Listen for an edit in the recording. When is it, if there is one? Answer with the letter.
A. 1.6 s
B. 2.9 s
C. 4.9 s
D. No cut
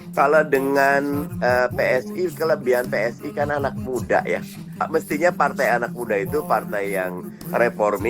C